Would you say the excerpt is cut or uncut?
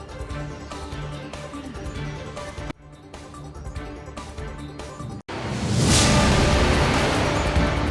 uncut